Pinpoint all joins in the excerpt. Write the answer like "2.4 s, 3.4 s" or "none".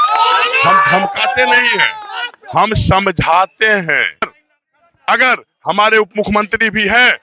4.4 s